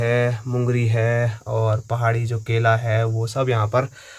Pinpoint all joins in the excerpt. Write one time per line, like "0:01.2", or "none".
none